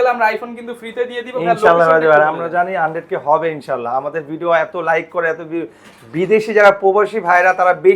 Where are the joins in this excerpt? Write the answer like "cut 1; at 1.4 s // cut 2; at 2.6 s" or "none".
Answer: none